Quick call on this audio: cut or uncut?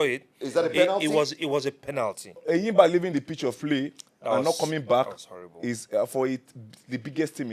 cut